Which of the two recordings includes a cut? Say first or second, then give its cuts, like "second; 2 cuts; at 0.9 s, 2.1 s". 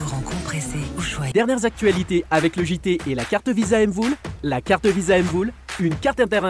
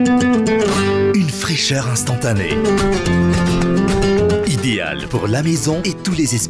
first; 1 cut; at 1.3 s